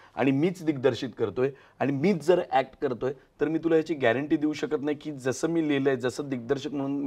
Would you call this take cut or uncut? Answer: uncut